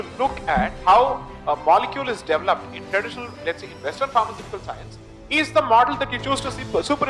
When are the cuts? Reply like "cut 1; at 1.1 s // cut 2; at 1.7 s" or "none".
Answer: none